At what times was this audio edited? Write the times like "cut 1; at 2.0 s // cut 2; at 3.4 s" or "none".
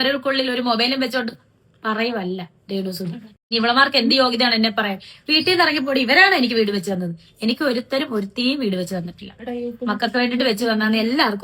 cut 1; at 3.3 s